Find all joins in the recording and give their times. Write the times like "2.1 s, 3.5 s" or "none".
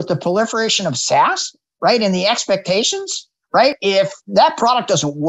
3.8 s